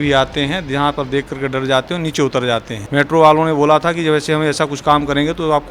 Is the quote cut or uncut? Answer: cut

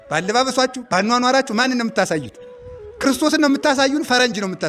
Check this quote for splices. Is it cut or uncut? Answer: uncut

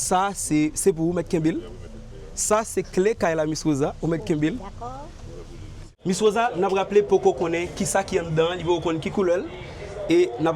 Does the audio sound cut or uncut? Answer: cut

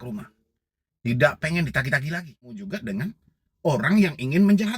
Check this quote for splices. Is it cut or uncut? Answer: cut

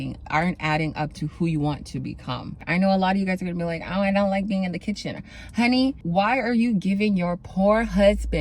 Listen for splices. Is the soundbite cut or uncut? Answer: cut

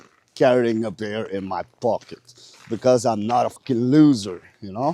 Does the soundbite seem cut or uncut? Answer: cut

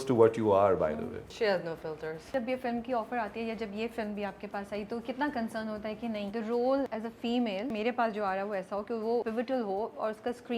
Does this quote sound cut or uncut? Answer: cut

